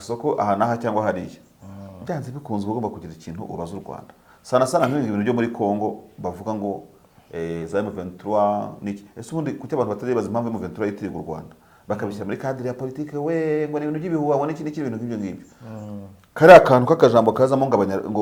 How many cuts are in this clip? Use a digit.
0